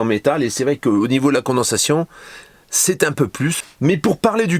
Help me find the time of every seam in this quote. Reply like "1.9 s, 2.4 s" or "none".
3.7 s